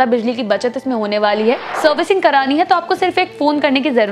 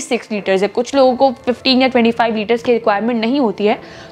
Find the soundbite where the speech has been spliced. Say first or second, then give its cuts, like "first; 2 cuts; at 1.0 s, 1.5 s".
first; 1 cut; at 1.7 s